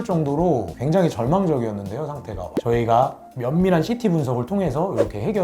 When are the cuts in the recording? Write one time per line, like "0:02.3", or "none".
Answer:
0:02.5